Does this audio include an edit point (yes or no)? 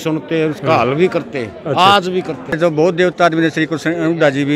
yes